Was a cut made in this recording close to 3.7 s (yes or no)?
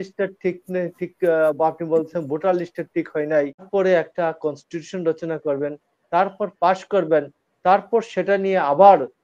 yes